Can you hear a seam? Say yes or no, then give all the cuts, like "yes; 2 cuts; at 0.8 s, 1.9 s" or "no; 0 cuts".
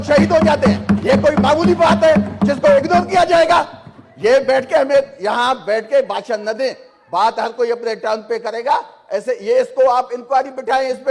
no; 0 cuts